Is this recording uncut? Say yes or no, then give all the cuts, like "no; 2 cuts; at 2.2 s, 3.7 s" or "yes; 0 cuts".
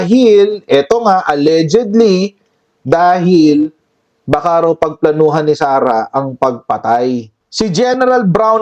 no; 1 cut; at 7.4 s